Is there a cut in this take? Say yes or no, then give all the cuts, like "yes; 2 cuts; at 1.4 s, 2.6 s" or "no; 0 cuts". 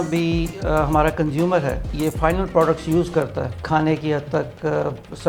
yes; 2 cuts; at 1.9 s, 3.6 s